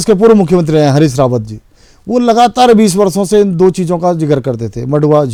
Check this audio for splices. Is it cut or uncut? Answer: uncut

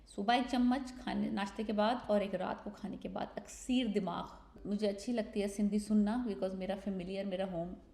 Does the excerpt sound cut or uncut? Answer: cut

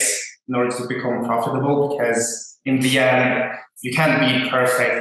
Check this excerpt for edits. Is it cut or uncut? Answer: uncut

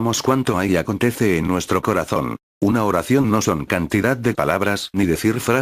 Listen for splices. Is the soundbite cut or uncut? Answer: cut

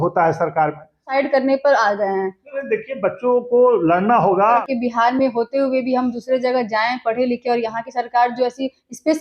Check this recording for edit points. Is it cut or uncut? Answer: cut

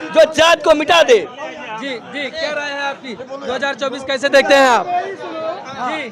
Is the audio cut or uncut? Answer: uncut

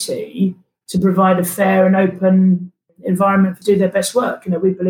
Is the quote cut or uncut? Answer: cut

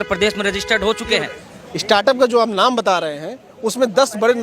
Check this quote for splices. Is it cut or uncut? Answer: cut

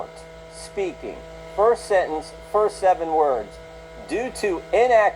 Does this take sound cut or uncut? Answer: uncut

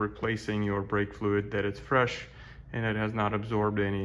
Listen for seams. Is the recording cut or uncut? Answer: uncut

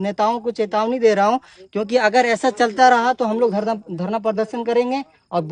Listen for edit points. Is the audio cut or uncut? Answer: uncut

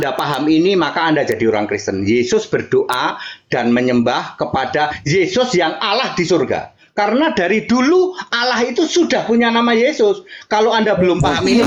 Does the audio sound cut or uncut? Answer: uncut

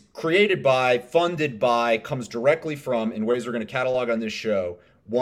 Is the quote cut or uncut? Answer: uncut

